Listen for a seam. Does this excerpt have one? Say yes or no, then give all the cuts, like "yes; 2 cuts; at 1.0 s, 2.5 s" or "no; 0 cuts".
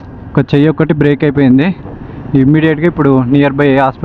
no; 0 cuts